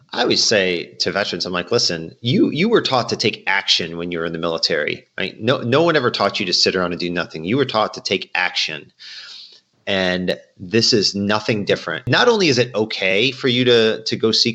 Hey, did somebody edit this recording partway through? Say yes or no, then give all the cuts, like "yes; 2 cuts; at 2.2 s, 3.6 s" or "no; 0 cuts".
yes; 1 cut; at 12.1 s